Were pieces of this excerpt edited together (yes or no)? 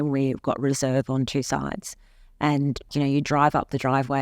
yes